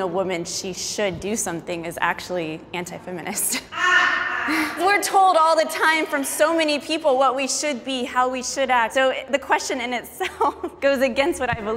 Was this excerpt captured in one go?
no; 3 cuts; at 4.8 s, 8.9 s, 10.7 s

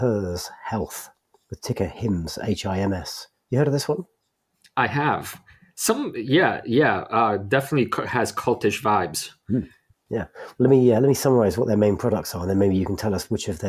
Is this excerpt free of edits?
yes; 0 cuts

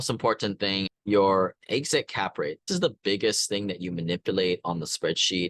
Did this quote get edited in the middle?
yes; 2 cuts; at 0.9 s, 2.7 s

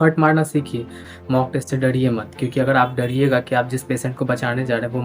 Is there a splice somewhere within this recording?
yes; 1 cut; at 1.0 s

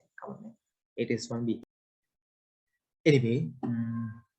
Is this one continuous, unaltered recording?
no; 1 cut; at 1.6 s

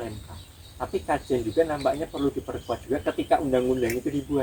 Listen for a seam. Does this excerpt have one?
no; 0 cuts

